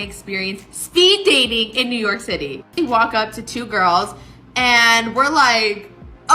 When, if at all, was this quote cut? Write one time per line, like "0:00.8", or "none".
0:02.7